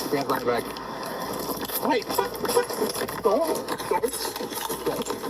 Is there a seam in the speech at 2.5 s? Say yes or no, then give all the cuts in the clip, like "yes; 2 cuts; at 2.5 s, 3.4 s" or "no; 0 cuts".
yes; 1 cut; at 2.5 s